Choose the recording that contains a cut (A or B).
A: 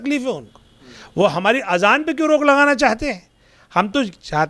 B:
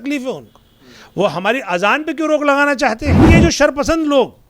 B